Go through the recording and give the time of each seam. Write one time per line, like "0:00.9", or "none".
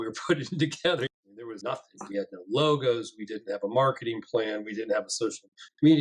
0:01.2